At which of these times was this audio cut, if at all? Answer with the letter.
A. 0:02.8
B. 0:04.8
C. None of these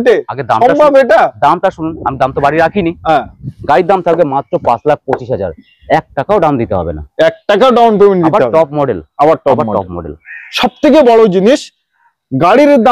C